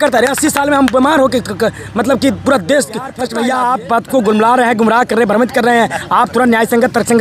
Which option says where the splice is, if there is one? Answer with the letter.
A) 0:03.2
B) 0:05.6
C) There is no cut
A